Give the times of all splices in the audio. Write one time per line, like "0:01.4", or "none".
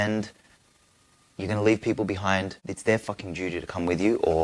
none